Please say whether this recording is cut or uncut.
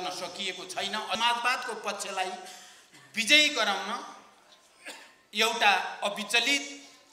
cut